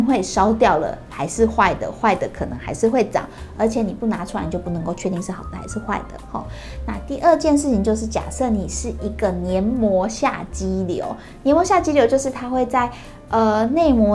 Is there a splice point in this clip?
no; 0 cuts

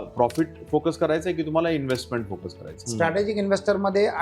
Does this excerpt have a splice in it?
yes; 1 cut; at 2.8 s

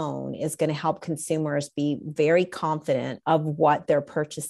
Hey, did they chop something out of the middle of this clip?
yes; 1 cut; at 3.1 s

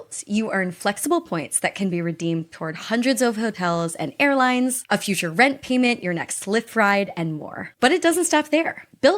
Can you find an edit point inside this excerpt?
yes; 1 cut; at 4.8 s

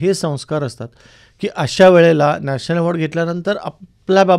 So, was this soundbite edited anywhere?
no; 0 cuts

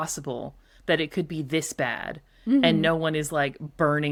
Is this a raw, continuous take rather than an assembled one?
yes; 0 cuts

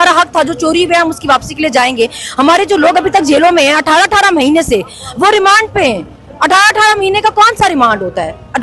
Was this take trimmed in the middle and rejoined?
no; 0 cuts

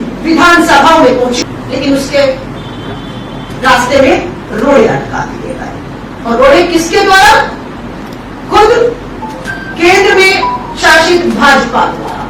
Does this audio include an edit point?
yes; 1 cut; at 1.4 s

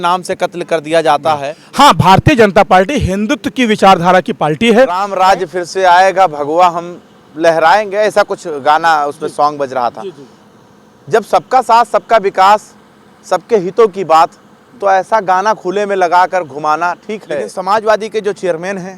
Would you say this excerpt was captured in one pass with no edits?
no; 3 cuts; at 1.6 s, 5.0 s, 17.5 s

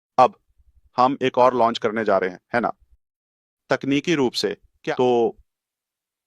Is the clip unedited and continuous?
no; 1 cut; at 4.7 s

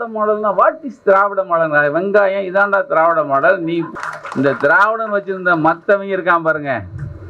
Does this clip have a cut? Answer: yes; 1 cut; at 3.9 s

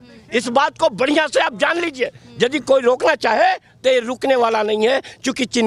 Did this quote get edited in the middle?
no; 0 cuts

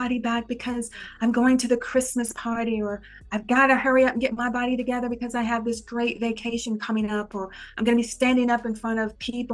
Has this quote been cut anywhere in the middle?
no; 0 cuts

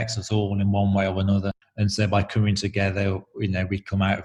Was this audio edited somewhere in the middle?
no; 0 cuts

